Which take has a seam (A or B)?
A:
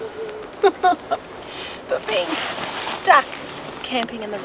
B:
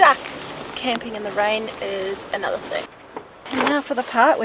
B